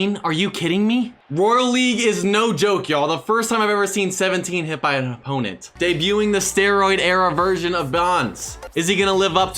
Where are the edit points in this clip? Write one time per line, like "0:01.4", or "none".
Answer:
0:01.2
0:05.6

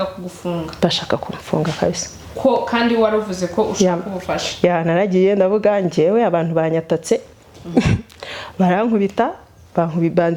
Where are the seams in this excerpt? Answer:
none

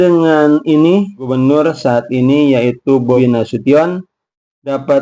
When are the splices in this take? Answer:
0:01.2
0:03.1

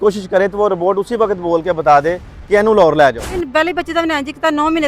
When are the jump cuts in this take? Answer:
0:03.3

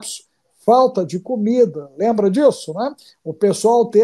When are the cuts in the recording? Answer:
none

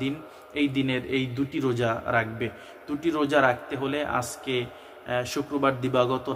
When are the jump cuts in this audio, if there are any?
none

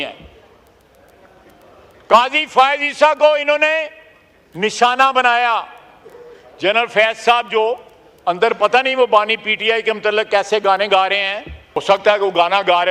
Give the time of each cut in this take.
0:11.8

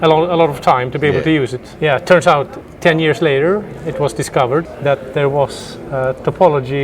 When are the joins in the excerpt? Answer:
0:01.6
0:02.6
0:04.7

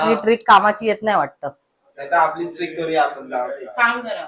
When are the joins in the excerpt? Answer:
none

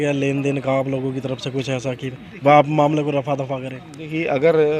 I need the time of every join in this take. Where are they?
none

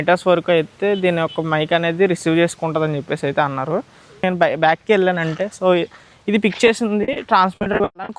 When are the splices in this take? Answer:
0:04.2

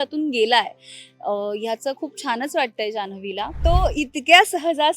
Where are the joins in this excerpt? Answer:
0:03.5

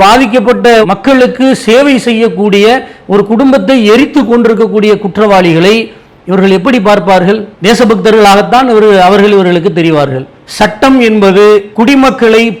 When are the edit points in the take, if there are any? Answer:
0:10.3

